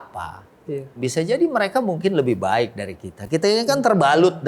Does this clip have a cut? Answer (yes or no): yes